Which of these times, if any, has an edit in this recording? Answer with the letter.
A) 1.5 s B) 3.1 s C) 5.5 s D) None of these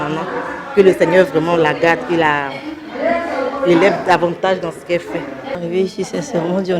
C